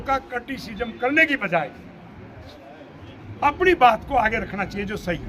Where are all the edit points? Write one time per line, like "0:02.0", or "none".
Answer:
none